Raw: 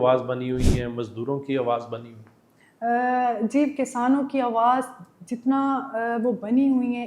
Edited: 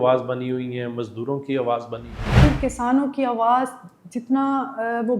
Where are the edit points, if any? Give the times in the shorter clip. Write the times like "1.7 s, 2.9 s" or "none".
2.4 s